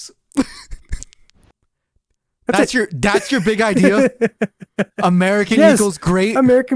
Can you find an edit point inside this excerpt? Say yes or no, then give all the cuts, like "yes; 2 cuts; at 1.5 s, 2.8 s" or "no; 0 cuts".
yes; 1 cut; at 1.4 s